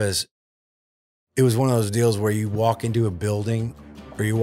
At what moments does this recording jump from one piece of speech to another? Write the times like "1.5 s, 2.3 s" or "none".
none